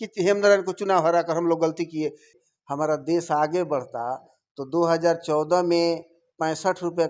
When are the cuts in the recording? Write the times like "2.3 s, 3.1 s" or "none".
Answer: 2.3 s